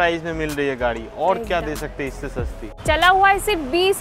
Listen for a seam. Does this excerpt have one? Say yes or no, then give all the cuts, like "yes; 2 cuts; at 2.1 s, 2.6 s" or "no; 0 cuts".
yes; 1 cut; at 2.6 s